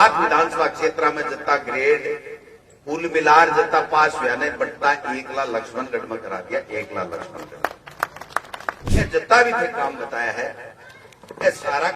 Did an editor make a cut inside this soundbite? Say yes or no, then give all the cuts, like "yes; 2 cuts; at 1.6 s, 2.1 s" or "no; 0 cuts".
yes; 1 cut; at 8.8 s